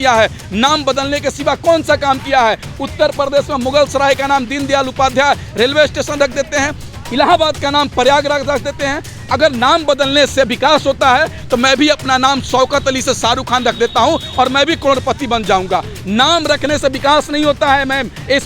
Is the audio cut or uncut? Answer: uncut